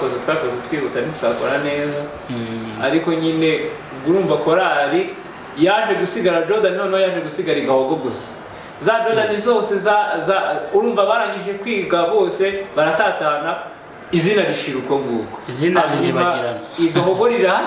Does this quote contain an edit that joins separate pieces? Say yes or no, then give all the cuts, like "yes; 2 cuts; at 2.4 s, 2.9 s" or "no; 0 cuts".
no; 0 cuts